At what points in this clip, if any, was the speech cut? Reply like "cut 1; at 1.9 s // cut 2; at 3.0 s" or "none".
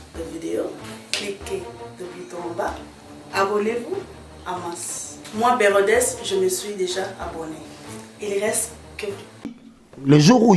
cut 1; at 9.5 s